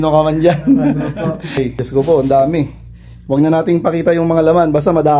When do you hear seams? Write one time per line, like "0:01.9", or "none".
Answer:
0:01.6